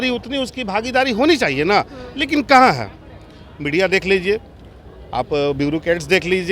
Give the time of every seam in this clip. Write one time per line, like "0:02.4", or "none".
none